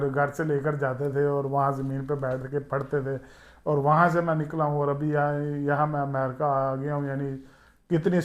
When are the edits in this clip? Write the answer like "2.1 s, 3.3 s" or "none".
none